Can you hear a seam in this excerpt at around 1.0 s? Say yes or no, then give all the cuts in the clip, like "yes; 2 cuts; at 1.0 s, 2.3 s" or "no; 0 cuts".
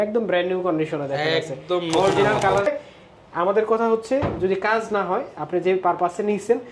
no; 1 cut; at 2.7 s